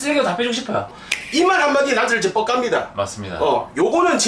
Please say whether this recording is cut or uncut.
cut